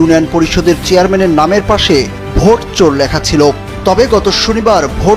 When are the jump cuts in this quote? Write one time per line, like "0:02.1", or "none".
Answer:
none